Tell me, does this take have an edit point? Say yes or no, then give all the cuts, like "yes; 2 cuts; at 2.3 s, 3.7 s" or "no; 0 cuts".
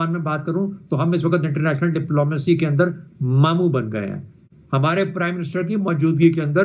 no; 0 cuts